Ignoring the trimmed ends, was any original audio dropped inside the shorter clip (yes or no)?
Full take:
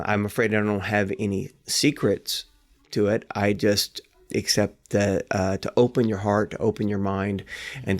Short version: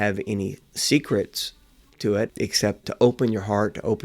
yes